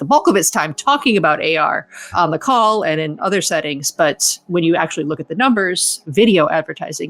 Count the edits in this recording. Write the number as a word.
one